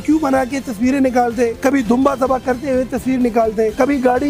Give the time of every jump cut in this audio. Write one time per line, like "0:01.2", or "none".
none